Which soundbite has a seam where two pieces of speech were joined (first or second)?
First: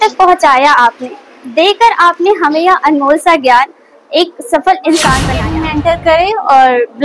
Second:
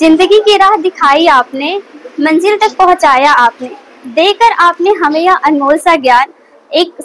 first